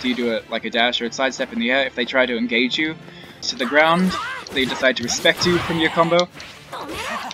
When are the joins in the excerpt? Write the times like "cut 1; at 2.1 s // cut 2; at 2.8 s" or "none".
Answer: cut 1; at 3.5 s